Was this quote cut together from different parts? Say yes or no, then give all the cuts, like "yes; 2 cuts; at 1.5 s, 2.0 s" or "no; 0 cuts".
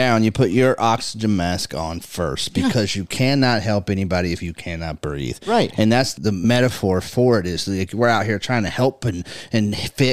yes; 1 cut; at 6.4 s